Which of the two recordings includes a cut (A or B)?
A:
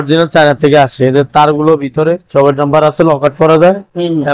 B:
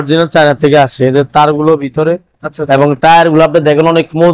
A